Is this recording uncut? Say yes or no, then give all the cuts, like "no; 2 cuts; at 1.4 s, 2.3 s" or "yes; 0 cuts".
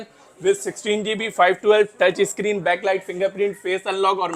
yes; 0 cuts